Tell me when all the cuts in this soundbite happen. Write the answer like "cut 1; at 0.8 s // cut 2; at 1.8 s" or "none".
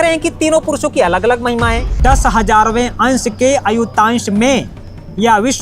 cut 1; at 1.9 s